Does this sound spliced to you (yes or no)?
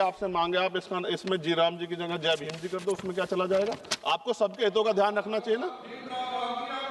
no